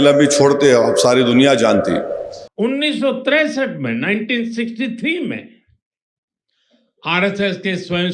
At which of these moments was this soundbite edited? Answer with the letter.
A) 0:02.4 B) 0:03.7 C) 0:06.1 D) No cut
A